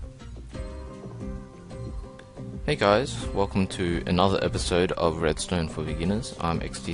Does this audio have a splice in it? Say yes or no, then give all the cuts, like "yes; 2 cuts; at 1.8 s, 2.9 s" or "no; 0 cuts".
yes; 1 cut; at 2.2 s